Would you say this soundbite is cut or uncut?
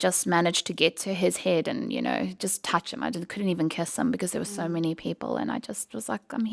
uncut